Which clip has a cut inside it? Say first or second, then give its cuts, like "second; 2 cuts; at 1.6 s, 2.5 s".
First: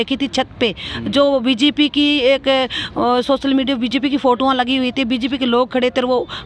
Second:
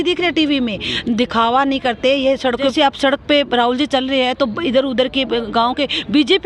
second; 1 cut; at 2.7 s